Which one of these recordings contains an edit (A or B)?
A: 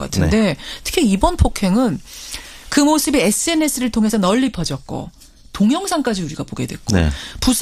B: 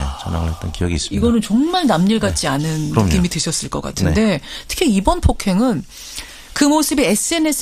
A